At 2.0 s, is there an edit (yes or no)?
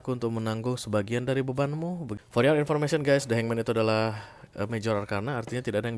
yes